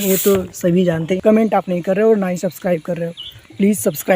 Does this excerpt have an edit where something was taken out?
yes; 1 cut; at 1.1 s

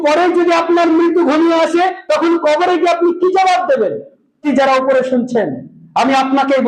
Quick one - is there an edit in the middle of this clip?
yes; 1 cut; at 4.4 s

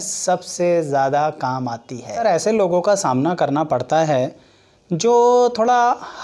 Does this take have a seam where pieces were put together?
yes; 1 cut; at 2.1 s

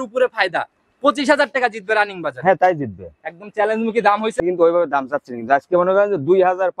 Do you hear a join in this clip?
yes; 1 cut; at 4.3 s

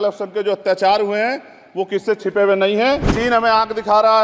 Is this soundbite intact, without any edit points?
no; 1 cut; at 3.1 s

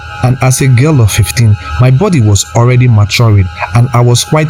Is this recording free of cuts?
yes; 0 cuts

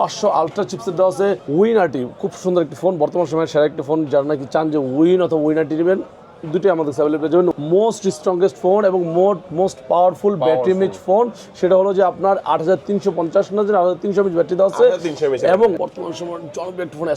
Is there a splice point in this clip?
yes; 3 cuts; at 1.5 s, 7.5 s, 15.8 s

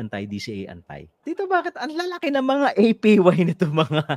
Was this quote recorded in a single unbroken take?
no; 1 cut; at 1.3 s

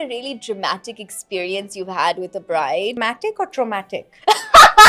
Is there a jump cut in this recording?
yes; 1 cut; at 2.9 s

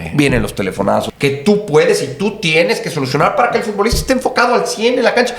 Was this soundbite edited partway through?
yes; 1 cut; at 1.1 s

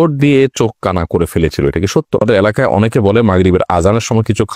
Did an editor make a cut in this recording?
yes; 1 cut; at 2.2 s

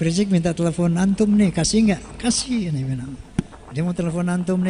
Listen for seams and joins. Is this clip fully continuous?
no; 1 cut; at 3.6 s

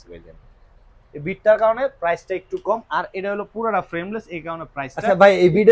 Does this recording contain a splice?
no; 0 cuts

